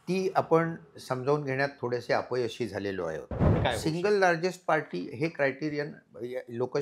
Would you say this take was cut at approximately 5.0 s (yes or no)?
no